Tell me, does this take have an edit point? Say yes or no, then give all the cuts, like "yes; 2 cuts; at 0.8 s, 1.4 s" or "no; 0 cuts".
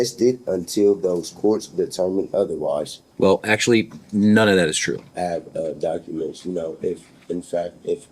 yes; 2 cuts; at 3.0 s, 5.1 s